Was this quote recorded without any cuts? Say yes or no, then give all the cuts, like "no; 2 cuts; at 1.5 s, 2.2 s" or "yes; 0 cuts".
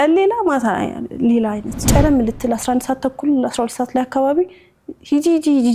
no; 1 cut; at 1.7 s